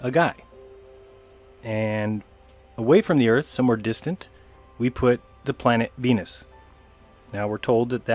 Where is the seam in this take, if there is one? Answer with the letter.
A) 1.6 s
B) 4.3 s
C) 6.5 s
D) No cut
D